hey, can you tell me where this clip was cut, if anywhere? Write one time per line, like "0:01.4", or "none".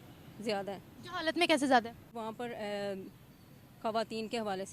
0:02.0